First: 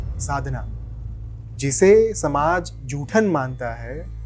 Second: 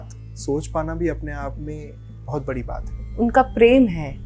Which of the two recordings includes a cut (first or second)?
second